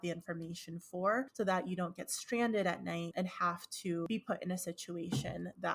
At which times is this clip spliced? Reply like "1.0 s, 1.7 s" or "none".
1.3 s, 4.1 s

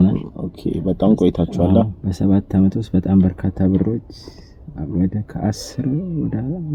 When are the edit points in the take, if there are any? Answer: none

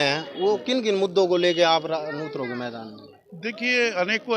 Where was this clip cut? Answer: none

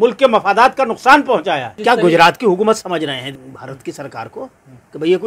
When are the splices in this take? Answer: 1.8 s, 3.4 s

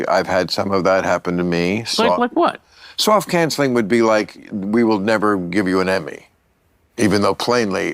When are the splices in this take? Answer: none

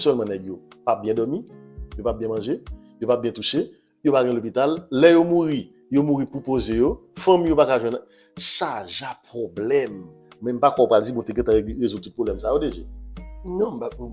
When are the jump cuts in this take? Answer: 8.3 s

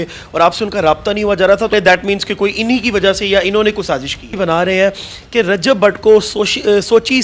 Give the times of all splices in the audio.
1.7 s, 4.3 s

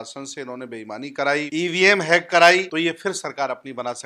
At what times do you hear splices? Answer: 1.5 s, 2.7 s

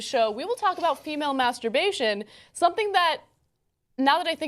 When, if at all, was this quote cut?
1.8 s

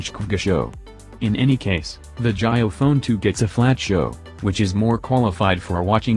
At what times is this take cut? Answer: 1.1 s, 2.0 s

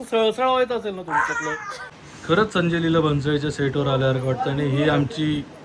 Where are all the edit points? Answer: 1.8 s

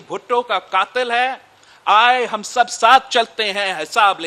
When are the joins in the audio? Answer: none

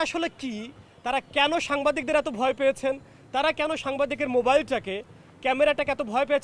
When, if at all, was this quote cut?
none

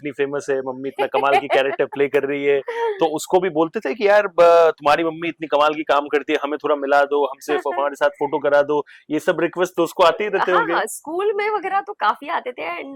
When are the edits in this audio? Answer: none

